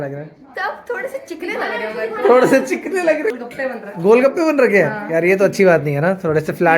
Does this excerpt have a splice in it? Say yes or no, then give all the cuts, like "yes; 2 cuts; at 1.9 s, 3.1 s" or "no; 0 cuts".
yes; 1 cut; at 3.3 s